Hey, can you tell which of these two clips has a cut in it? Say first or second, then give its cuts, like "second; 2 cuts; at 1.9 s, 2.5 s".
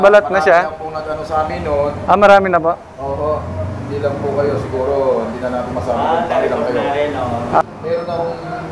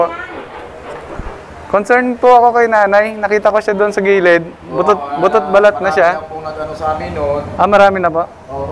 first; 1 cut; at 7.6 s